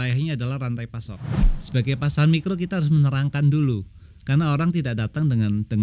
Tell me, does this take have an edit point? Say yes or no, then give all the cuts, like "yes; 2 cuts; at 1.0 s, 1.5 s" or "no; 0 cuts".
yes; 1 cut; at 1.3 s